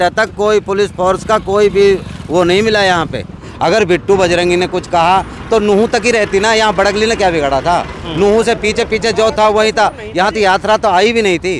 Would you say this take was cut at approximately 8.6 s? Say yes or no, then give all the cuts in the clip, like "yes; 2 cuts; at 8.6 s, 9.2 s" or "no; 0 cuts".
no; 1 cut; at 3.4 s